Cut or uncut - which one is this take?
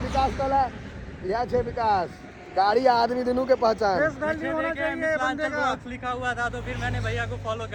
uncut